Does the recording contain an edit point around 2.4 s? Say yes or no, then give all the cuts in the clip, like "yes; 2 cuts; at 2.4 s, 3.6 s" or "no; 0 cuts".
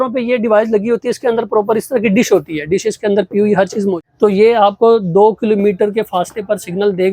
no; 1 cut; at 3.9 s